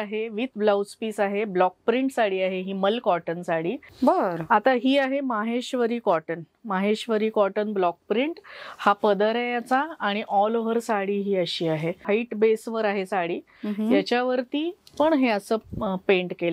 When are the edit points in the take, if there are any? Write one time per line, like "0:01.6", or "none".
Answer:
0:03.9
0:12.0